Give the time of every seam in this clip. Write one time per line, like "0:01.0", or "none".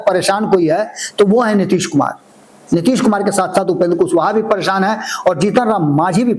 none